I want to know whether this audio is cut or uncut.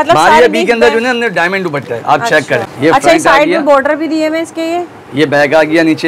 cut